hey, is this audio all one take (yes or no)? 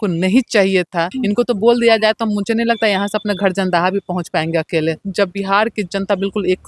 no